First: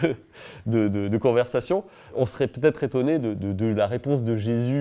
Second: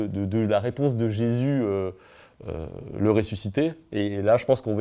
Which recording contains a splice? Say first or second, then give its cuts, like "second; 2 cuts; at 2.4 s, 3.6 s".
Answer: first; 1 cut; at 2.0 s